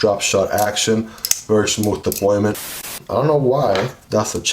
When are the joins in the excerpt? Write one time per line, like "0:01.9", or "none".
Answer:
0:02.7